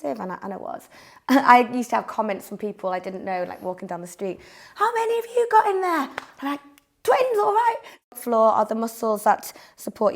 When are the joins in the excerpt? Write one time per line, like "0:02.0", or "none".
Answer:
0:08.0